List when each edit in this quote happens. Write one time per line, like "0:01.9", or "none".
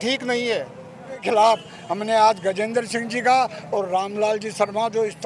0:01.2